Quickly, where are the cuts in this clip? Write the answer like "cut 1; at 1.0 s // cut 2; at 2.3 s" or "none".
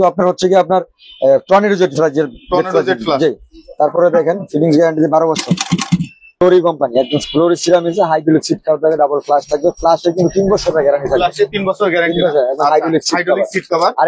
cut 1; at 6.4 s